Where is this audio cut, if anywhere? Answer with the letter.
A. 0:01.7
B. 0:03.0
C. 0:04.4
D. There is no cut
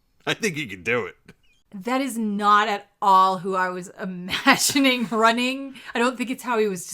A